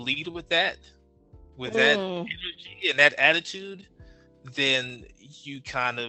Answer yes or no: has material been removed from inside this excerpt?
no